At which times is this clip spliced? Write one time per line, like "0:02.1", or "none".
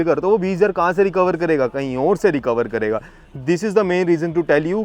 none